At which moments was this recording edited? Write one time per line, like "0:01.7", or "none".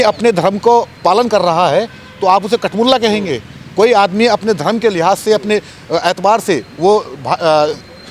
none